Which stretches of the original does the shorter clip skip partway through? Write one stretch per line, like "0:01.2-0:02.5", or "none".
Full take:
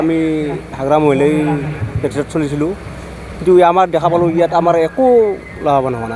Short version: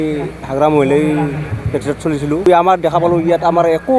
0:02.8-0:03.6